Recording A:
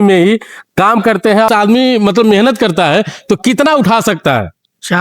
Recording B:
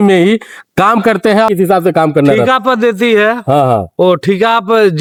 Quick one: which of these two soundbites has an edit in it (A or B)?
A